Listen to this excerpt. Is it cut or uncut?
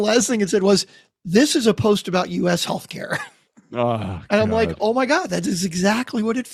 uncut